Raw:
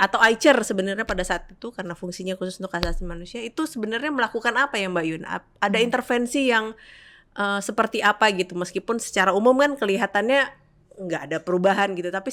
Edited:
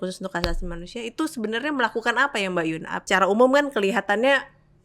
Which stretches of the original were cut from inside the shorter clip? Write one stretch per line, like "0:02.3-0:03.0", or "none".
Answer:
0:05.4-0:09.1